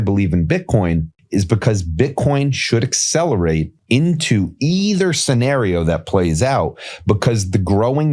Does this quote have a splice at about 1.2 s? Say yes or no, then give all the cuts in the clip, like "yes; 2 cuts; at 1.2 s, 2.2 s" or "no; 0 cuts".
yes; 2 cuts; at 1.2 s, 3.7 s